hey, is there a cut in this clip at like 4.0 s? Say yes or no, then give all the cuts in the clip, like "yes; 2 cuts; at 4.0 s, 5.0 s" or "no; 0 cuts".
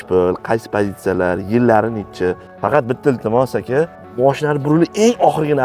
yes; 2 cuts; at 2.5 s, 4.0 s